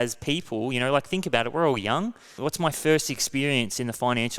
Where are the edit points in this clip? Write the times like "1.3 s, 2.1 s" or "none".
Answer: 2.3 s